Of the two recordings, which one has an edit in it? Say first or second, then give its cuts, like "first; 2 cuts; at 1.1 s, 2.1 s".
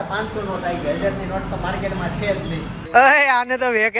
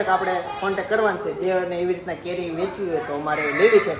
first; 1 cut; at 2.8 s